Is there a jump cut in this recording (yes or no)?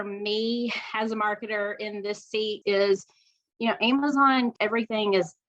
yes